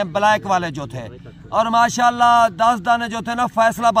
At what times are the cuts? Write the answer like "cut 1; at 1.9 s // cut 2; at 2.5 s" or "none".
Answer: none